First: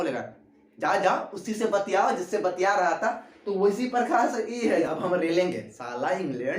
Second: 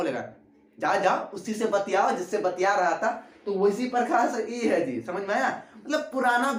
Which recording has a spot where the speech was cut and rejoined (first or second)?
first